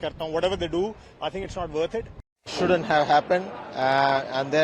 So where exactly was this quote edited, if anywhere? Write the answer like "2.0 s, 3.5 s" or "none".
2.5 s